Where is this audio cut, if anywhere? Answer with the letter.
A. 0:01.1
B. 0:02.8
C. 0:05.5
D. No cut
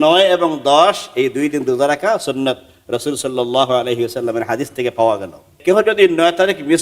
C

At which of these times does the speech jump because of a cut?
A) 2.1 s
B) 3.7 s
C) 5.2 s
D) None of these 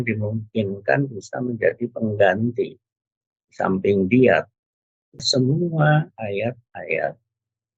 C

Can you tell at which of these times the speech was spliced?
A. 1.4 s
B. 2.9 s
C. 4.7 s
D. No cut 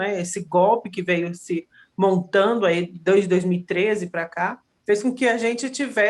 C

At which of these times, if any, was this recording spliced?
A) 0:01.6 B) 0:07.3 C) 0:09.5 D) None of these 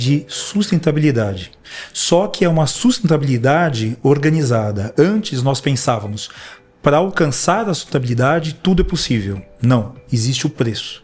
D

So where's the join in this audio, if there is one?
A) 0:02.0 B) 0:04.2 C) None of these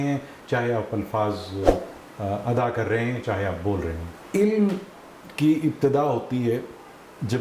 B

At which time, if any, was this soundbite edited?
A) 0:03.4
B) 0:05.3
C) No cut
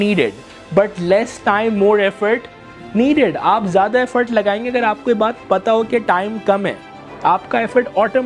C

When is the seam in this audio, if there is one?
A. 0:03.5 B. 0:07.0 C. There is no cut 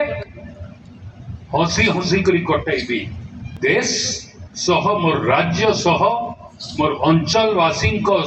A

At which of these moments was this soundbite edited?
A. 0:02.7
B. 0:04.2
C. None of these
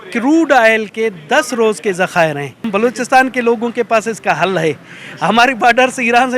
A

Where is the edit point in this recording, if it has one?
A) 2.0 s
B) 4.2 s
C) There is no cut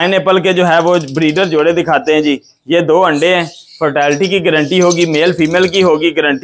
C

